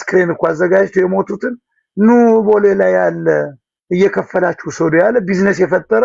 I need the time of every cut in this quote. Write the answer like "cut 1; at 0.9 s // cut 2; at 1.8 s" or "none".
none